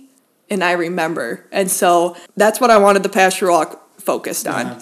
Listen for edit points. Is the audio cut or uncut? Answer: cut